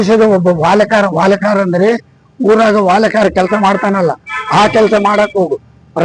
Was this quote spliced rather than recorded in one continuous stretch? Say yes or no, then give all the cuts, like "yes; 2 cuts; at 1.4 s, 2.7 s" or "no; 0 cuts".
no; 0 cuts